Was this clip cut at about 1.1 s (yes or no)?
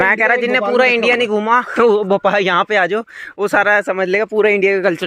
no